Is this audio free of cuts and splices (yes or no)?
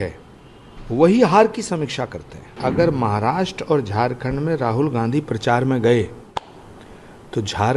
no